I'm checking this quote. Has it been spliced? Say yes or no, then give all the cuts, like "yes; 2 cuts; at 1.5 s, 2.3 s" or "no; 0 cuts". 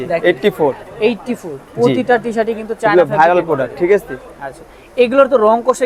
no; 0 cuts